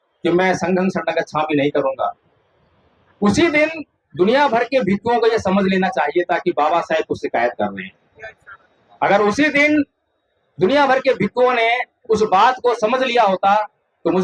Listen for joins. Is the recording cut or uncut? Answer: uncut